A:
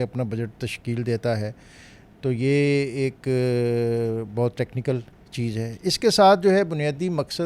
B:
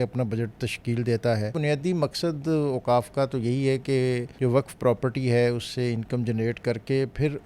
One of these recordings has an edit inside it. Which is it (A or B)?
B